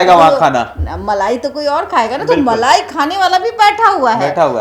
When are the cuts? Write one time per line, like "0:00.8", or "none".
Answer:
none